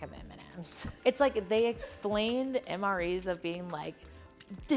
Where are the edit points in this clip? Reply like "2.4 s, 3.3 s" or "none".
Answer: 1.0 s